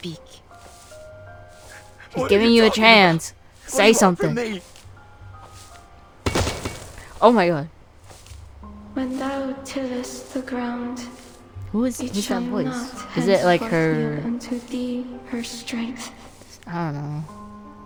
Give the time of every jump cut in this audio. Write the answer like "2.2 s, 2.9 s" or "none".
none